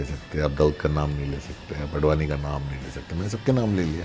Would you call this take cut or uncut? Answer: uncut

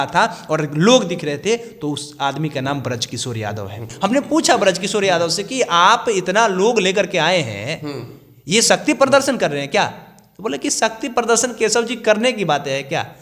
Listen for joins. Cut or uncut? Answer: cut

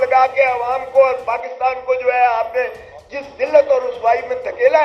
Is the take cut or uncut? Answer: uncut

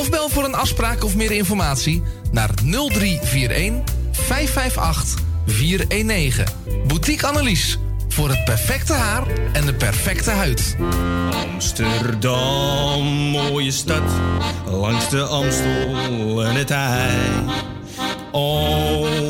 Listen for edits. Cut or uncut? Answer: cut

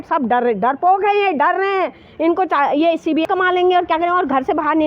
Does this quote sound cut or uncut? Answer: cut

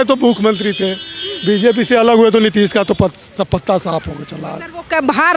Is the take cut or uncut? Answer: uncut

